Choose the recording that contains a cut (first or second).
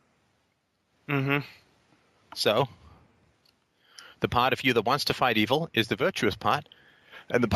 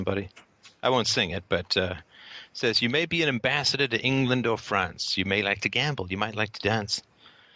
second